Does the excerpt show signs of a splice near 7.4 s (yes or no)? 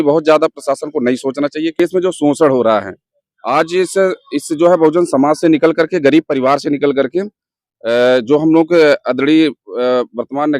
no